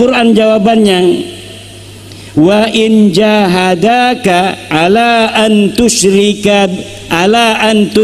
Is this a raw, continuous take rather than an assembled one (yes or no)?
yes